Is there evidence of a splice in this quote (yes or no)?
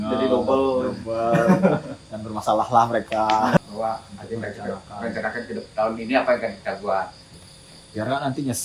yes